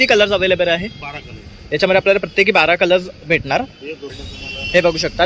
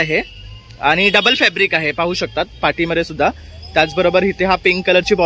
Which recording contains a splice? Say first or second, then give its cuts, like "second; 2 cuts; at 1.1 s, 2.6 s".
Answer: first; 1 cut; at 4.1 s